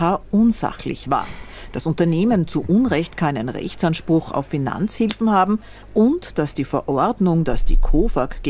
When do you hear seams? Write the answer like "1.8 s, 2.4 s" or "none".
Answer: 5.8 s